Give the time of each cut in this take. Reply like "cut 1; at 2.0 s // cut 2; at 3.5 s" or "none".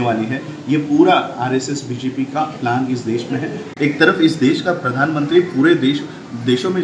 cut 1; at 3.7 s